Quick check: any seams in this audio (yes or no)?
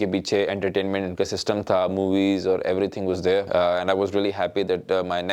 no